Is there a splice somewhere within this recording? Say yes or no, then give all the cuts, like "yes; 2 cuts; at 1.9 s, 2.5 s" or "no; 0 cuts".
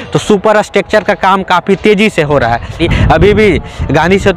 yes; 1 cut; at 2.8 s